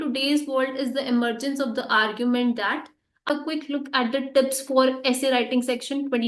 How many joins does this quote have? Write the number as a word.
one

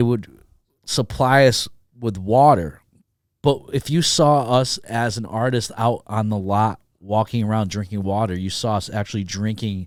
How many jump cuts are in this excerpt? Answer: zero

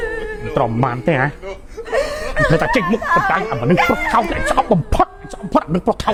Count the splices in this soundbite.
zero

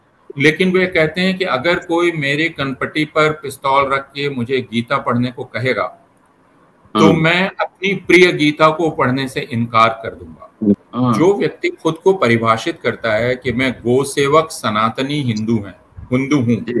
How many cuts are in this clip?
one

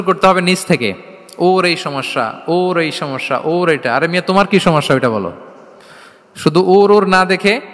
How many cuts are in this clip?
zero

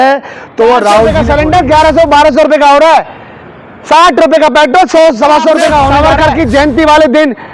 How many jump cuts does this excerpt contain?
two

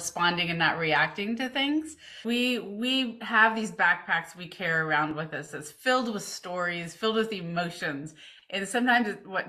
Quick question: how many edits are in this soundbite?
one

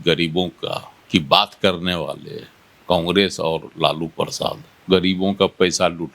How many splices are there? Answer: two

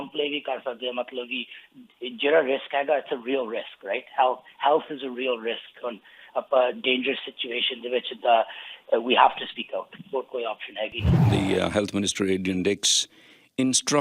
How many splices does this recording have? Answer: one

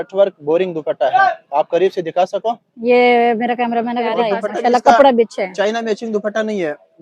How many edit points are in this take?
one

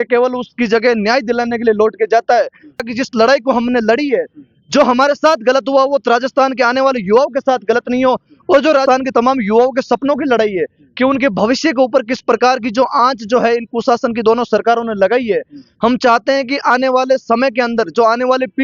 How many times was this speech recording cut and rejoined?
two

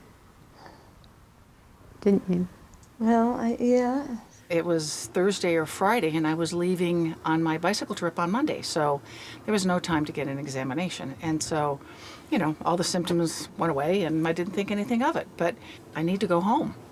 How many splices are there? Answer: two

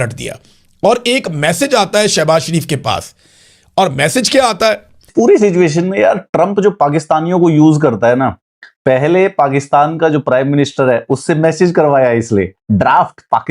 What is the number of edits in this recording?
one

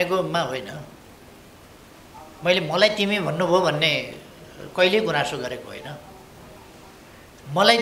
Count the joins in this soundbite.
zero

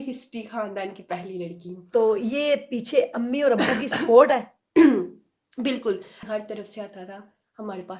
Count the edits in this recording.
one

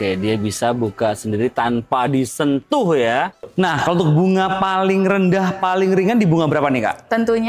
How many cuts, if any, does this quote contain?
one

